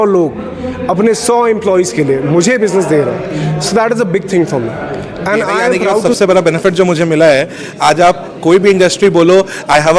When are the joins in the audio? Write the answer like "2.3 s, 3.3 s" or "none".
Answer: 5.7 s